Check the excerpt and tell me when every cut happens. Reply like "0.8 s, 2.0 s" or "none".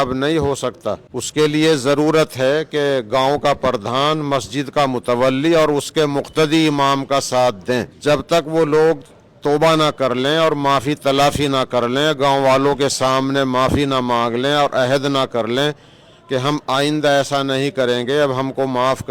1.1 s, 7.9 s